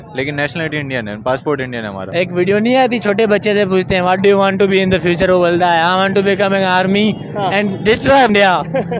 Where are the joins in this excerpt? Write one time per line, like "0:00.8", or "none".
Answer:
0:02.0
0:08.3